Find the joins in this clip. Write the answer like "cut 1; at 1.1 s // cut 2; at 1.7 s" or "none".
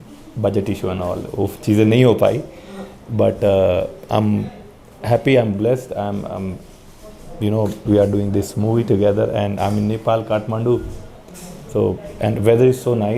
none

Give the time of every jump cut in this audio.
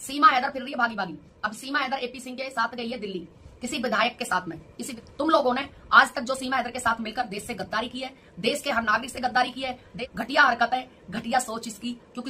cut 1; at 4.8 s // cut 2; at 9.8 s

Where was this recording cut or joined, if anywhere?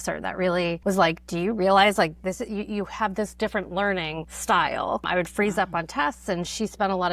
cut 1; at 0.8 s // cut 2; at 4.3 s // cut 3; at 5.1 s

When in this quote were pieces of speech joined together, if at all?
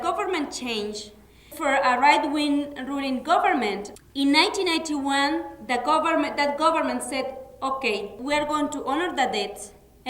cut 1; at 1.5 s // cut 2; at 3.9 s // cut 3; at 8.2 s

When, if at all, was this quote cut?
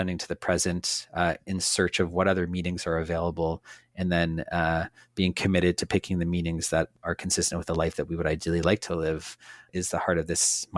cut 1; at 6.9 s // cut 2; at 9.7 s

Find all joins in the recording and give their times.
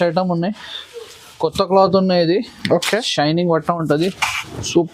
none

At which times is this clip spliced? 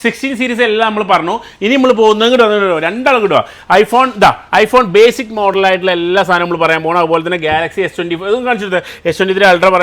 none

